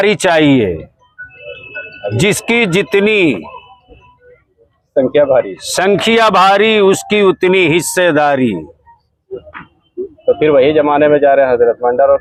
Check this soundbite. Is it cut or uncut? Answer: uncut